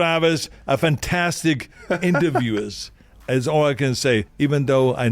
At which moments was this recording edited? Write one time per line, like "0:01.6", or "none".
0:01.7